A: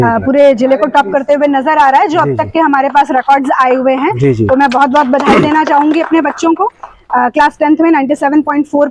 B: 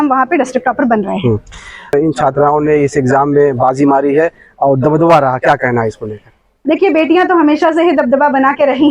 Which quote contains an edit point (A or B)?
B